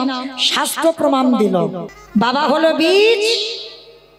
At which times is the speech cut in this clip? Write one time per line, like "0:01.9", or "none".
0:01.9